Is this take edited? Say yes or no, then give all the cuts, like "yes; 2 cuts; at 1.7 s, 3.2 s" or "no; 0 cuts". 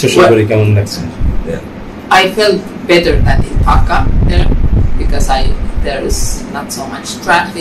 yes; 1 cut; at 2.0 s